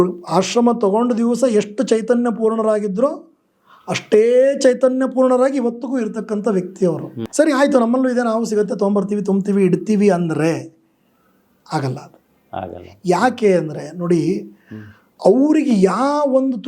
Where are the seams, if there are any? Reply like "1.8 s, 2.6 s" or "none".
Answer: 7.2 s, 15.1 s